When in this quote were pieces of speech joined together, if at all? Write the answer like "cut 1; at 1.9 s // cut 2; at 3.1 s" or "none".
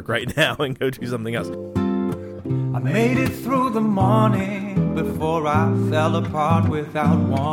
cut 1; at 1.5 s